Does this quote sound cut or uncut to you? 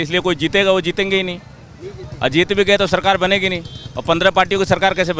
uncut